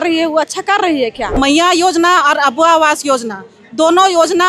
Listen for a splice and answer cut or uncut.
cut